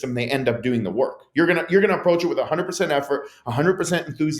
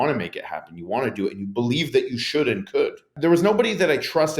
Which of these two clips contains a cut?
second; 1 cut; at 3.1 s

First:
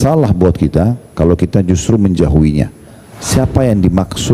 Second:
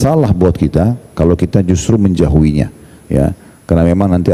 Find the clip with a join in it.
first; 1 cut; at 2.9 s

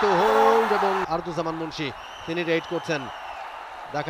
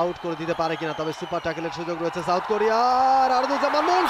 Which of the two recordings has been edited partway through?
first; 1 cut; at 1.1 s

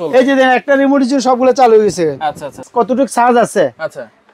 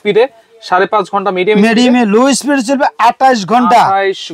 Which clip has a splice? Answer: first; 1 cut; at 2.5 s

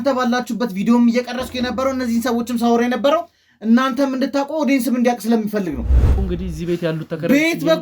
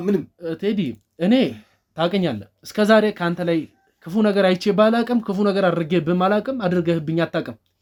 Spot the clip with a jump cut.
first; 1 cut; at 6.1 s

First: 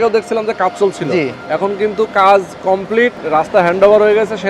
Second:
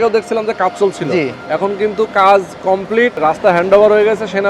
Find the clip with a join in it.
second; 1 cut; at 3.1 s

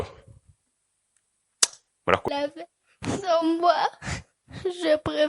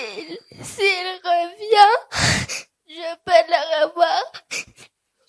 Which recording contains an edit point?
first; 1 cut; at 2.3 s

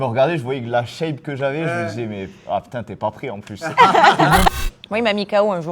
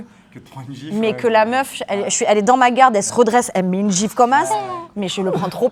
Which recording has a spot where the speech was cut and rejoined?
first; 1 cut; at 4.5 s

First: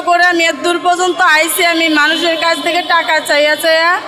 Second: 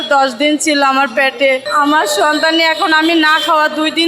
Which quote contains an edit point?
second; 1 cut; at 1.6 s

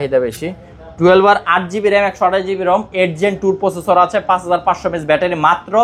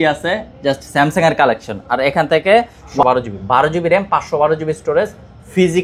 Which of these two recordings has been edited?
second; 1 cut; at 3.0 s

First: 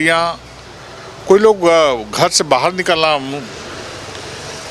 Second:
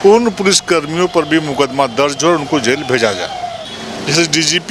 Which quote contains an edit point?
second; 1 cut; at 3.6 s

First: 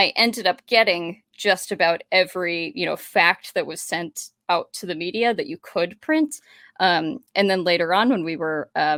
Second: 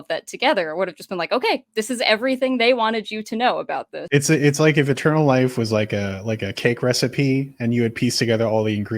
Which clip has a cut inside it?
second; 1 cut; at 4.0 s

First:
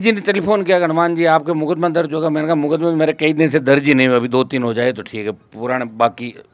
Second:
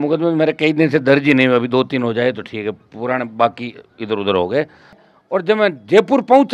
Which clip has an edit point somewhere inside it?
second; 1 cut; at 5.0 s

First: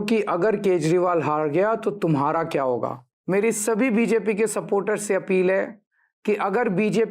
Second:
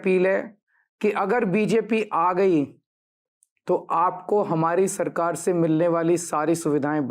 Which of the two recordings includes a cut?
first; 1 cut; at 3.1 s

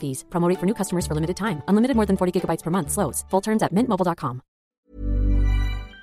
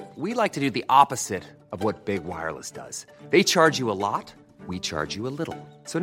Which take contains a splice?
first; 1 cut; at 4.7 s

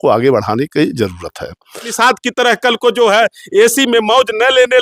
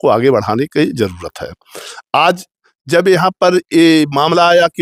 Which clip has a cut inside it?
first; 1 cut; at 1.9 s

